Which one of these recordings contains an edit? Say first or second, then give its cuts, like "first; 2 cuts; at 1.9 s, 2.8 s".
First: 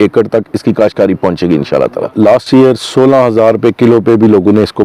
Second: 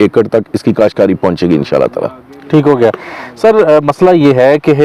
first; 1 cut; at 2.1 s